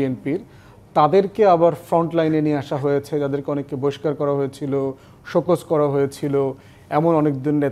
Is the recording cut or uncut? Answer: uncut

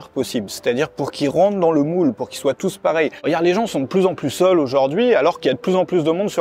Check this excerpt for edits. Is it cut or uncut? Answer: cut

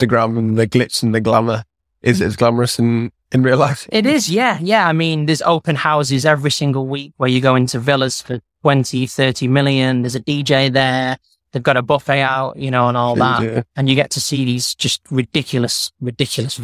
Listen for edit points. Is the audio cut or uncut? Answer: uncut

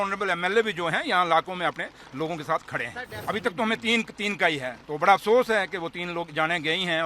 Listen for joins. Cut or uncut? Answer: cut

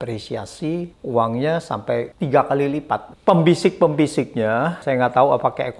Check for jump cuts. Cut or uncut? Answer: cut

